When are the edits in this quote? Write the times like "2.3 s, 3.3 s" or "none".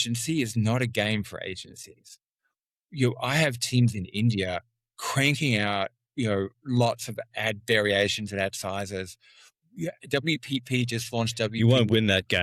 none